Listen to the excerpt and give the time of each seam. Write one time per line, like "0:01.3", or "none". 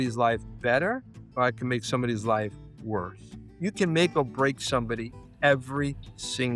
0:01.2
0:03.4